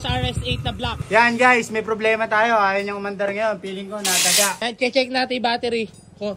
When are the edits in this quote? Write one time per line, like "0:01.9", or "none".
0:01.0
0:04.6